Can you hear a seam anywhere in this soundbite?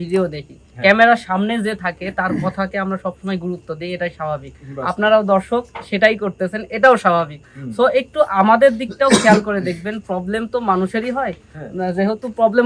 no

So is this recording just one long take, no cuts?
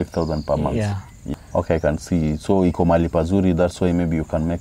no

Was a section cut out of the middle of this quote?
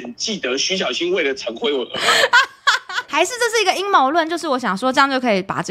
yes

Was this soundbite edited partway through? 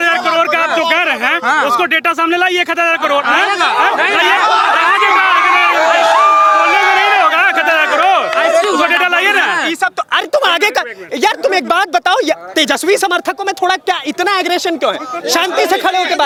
no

